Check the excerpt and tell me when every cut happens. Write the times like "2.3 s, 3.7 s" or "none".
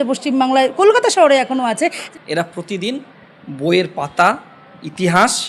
2.1 s